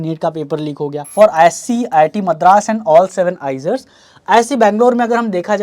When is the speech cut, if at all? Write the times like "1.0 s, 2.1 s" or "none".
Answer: 1.0 s